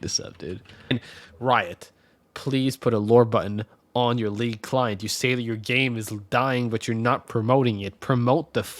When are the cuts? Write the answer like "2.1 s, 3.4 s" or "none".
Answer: 0.9 s